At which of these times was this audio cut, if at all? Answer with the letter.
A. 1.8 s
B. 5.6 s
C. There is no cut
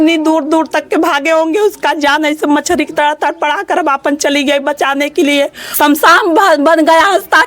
B